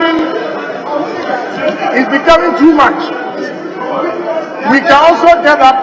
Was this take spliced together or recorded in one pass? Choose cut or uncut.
uncut